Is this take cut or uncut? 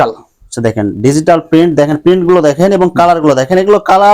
uncut